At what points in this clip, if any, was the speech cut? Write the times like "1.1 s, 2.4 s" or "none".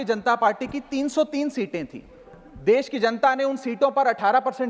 none